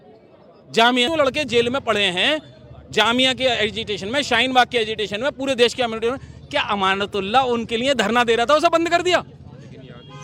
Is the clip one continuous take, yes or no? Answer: no